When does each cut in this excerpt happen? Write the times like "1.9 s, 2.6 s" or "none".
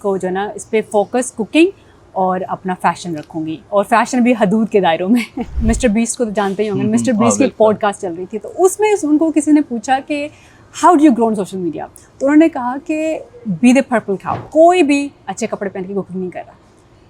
5.5 s, 14.4 s